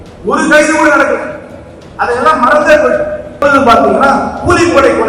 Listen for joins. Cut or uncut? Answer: cut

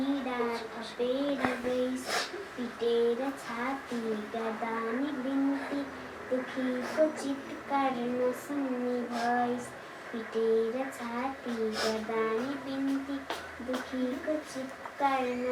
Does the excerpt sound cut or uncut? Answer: uncut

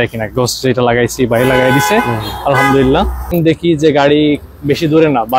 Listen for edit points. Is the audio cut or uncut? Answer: cut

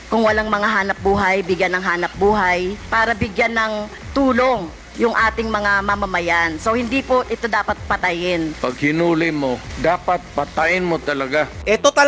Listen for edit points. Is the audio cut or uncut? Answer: cut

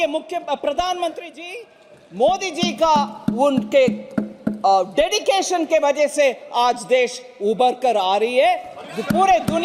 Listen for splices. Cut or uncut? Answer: uncut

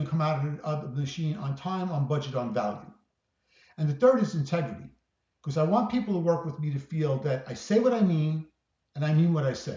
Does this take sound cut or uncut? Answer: uncut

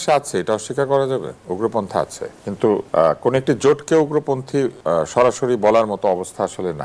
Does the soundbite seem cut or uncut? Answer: cut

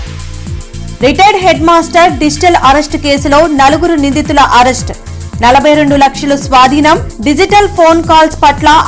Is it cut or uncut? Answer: cut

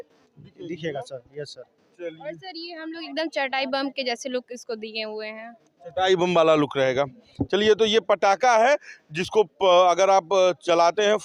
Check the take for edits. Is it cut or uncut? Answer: uncut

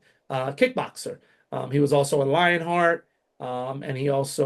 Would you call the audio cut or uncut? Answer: uncut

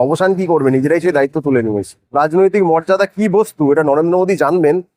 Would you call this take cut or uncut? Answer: cut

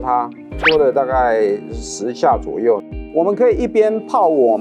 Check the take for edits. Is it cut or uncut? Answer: cut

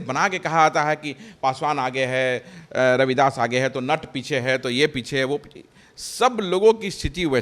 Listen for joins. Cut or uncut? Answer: uncut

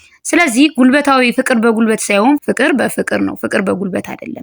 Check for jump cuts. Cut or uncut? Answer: cut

